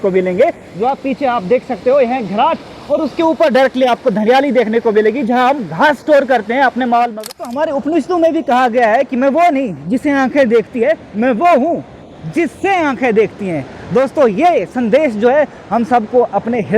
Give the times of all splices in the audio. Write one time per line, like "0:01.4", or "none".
0:07.3